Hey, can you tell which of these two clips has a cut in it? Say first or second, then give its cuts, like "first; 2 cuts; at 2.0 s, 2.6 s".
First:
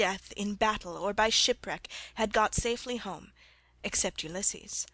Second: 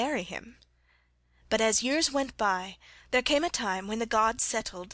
first; 1 cut; at 1.4 s